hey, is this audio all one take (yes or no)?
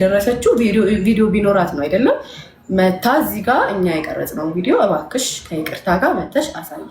yes